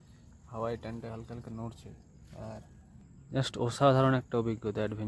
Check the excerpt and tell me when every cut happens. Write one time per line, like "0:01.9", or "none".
0:03.1